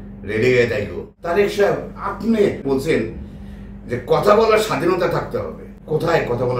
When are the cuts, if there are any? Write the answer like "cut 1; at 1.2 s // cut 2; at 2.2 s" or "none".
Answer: cut 1; at 1.1 s // cut 2; at 2.6 s // cut 3; at 5.7 s